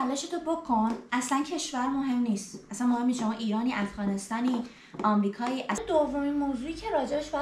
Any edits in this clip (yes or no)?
yes